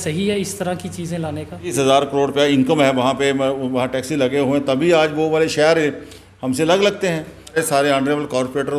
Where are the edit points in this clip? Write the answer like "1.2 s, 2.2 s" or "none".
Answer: 1.7 s, 7.6 s